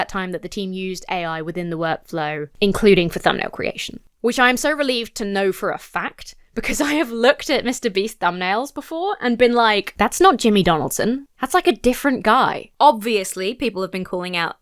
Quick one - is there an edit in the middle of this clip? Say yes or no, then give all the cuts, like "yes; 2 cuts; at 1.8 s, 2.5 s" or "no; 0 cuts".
yes; 2 cuts; at 9.9 s, 12.6 s